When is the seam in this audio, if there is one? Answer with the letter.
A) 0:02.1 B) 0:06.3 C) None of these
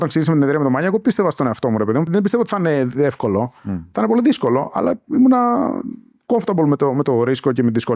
A